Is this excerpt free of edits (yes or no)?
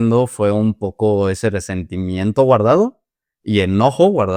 yes